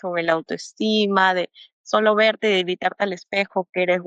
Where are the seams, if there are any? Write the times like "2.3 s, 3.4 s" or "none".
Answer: none